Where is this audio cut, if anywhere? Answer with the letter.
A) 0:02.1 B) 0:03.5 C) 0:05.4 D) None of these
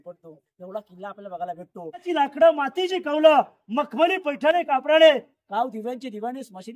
A